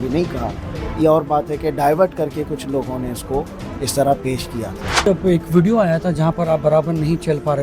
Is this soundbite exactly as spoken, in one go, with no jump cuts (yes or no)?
no